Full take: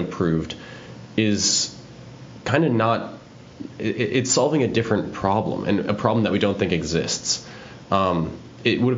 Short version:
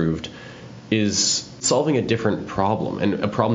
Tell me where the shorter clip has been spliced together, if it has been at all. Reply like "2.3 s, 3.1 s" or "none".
1.6 s